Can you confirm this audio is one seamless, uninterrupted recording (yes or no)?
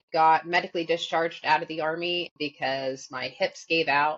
no